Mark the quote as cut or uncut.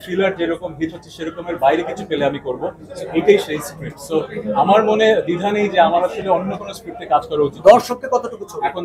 uncut